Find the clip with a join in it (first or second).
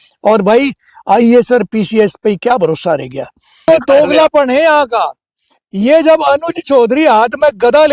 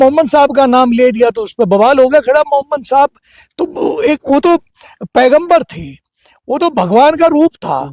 first